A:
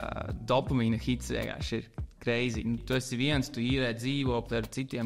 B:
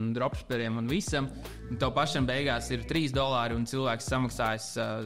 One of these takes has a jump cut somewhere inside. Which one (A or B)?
A